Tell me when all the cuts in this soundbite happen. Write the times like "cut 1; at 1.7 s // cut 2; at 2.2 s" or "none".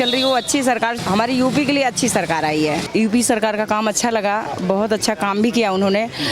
cut 1; at 1.0 s // cut 2; at 2.8 s